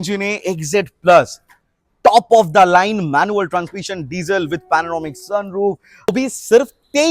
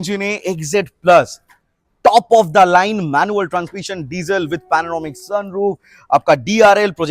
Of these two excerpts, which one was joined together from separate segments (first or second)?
first